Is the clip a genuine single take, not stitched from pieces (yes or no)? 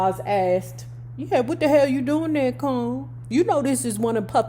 no